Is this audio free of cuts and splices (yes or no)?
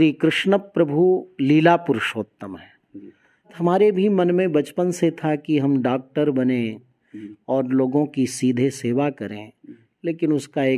no